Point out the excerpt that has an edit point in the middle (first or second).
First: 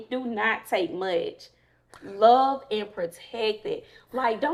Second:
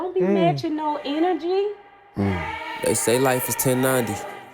second